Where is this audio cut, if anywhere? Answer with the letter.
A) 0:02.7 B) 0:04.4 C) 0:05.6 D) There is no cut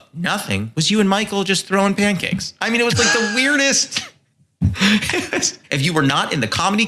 C